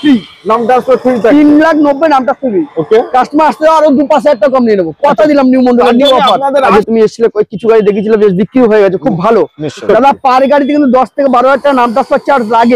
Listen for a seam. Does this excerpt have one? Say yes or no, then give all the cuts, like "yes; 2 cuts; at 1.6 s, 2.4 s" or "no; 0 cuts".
yes; 2 cuts; at 6.7 s, 9.8 s